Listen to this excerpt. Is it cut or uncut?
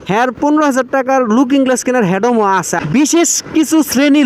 cut